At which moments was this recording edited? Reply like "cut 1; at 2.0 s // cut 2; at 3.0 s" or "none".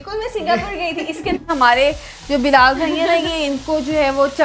cut 1; at 1.5 s